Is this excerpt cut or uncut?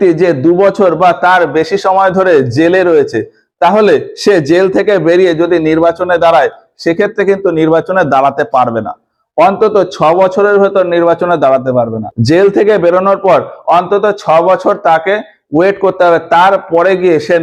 uncut